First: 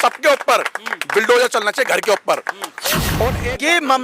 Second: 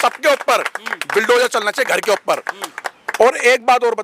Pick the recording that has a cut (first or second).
first